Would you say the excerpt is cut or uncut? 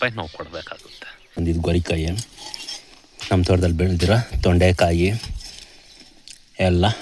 cut